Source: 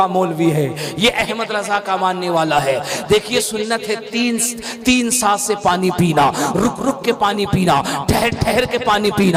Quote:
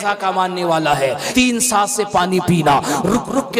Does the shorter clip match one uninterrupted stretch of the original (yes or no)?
no